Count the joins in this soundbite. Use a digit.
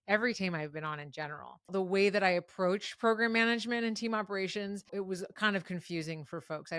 2